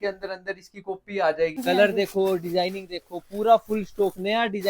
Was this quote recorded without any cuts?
no; 1 cut; at 1.6 s

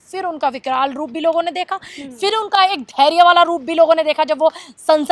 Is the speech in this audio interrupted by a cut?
no; 0 cuts

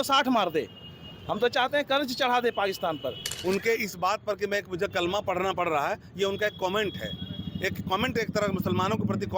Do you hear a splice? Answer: yes; 1 cut; at 3.3 s

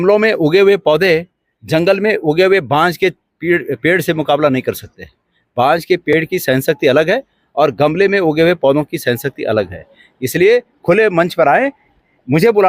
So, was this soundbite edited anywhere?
no; 0 cuts

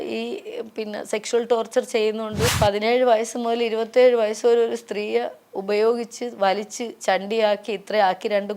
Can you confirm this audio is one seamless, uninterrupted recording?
no; 1 cut; at 2.5 s

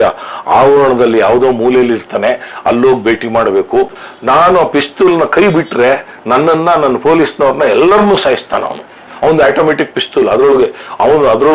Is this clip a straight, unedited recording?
no; 1 cut; at 4.0 s

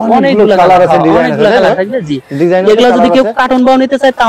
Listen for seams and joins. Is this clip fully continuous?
yes; 0 cuts

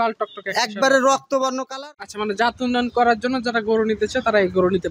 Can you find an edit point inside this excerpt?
yes; 1 cut; at 1.6 s

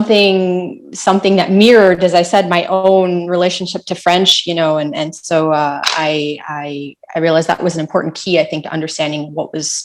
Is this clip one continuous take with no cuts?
yes; 0 cuts

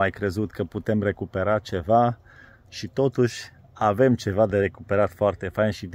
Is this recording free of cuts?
yes; 0 cuts

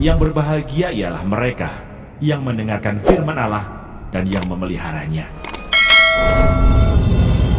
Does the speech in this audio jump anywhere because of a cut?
no; 0 cuts

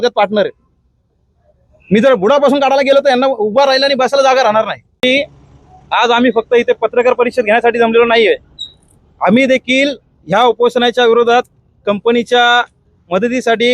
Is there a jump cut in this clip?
yes; 1 cut; at 4.8 s

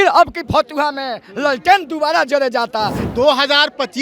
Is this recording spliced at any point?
yes; 1 cut; at 3.0 s

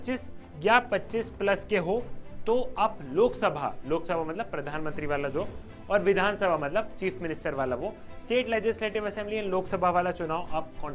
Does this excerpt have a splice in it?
no; 0 cuts

